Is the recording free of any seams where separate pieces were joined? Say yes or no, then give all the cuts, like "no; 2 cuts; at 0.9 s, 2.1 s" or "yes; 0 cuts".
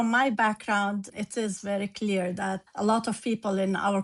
no; 2 cuts; at 1.1 s, 2.6 s